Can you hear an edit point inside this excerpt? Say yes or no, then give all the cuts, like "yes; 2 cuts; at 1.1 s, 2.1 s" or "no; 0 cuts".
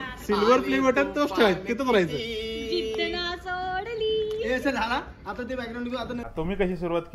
yes; 1 cut; at 6.2 s